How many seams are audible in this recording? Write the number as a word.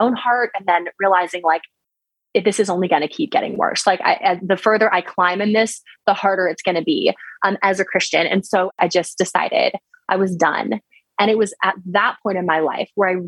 two